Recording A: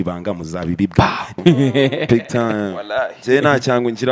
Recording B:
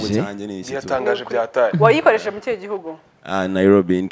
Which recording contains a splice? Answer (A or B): A